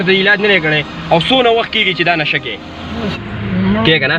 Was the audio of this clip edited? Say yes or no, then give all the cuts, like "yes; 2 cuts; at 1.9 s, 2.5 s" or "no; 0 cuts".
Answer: yes; 1 cut; at 3.1 s